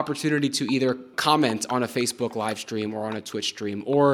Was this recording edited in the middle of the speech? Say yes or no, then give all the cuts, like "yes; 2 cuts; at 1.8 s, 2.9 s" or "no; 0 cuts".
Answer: yes; 1 cut; at 1.1 s